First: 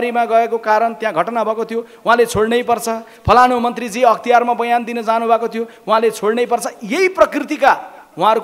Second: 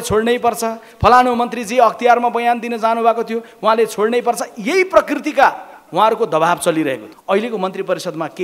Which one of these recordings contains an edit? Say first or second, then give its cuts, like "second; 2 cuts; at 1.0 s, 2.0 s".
second; 1 cut; at 7.1 s